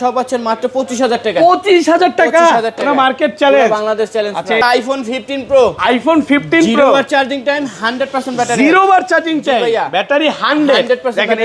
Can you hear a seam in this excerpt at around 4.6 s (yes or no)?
yes